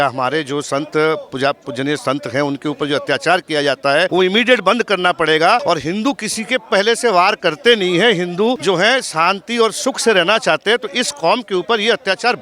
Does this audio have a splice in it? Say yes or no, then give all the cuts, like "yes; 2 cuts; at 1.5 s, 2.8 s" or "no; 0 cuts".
yes; 3 cuts; at 4.1 s, 5.6 s, 8.6 s